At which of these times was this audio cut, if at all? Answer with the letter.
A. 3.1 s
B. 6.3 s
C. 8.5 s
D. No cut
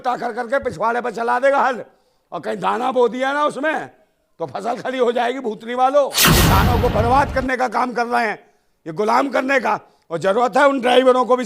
B